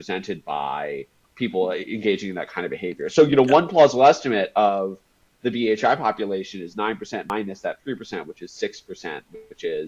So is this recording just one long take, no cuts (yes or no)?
no